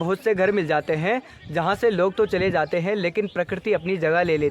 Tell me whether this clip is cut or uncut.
uncut